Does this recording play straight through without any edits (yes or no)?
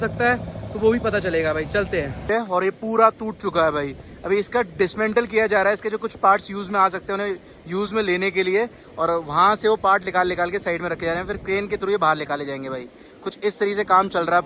no